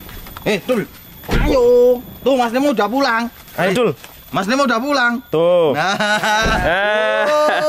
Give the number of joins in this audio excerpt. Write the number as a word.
zero